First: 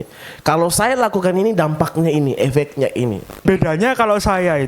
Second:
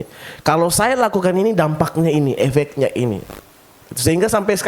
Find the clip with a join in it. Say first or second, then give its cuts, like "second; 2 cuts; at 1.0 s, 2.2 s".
first; 1 cut; at 3.4 s